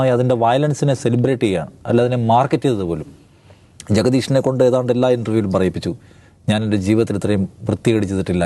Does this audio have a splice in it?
no; 0 cuts

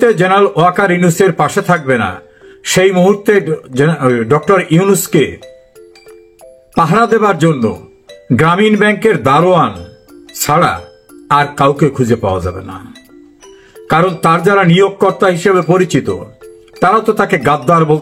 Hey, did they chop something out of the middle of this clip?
no; 0 cuts

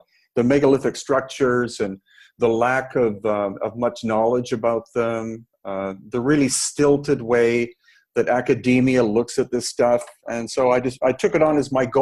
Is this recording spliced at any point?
no; 0 cuts

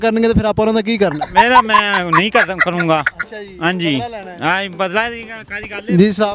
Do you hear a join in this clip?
no; 0 cuts

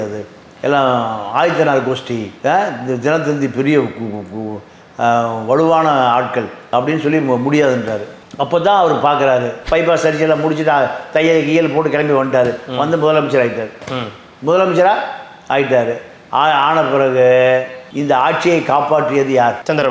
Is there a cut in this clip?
yes; 1 cut; at 9.6 s

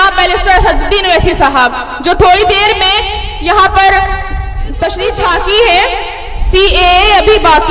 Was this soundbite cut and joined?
yes; 1 cut; at 5.1 s

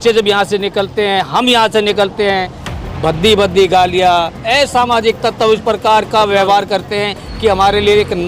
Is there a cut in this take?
no; 0 cuts

